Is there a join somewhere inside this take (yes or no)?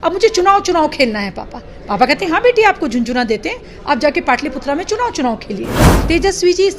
yes